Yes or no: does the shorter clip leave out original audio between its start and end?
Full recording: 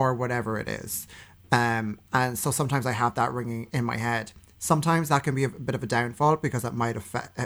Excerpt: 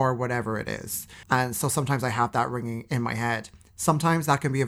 yes